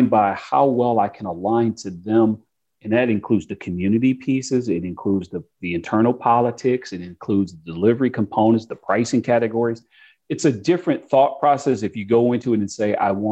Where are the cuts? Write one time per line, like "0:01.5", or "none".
none